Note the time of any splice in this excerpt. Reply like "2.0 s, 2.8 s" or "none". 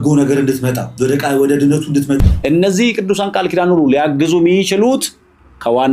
2.3 s